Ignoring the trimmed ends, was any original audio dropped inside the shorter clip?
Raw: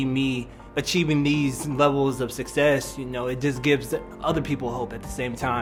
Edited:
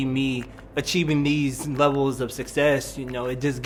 no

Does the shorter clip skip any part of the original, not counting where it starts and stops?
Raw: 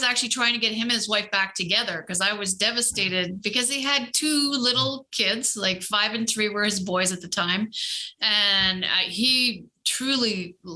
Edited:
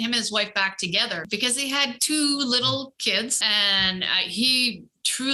yes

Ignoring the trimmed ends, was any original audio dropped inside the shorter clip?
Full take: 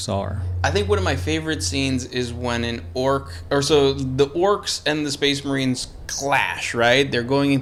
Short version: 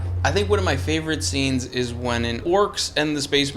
yes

